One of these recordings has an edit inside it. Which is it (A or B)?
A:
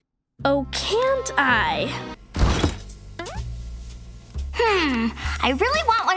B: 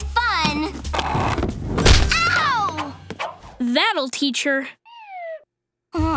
A